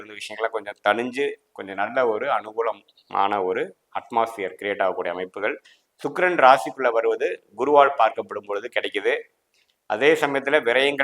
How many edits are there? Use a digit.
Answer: 0